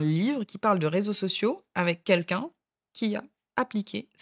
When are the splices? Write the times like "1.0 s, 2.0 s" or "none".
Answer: none